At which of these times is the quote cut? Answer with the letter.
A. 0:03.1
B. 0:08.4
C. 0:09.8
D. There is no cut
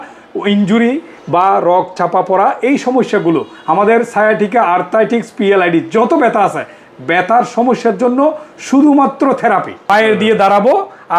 C